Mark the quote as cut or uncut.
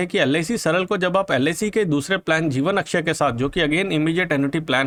uncut